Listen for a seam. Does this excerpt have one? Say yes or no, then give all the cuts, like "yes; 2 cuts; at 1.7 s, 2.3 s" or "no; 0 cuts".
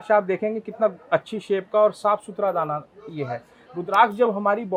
no; 0 cuts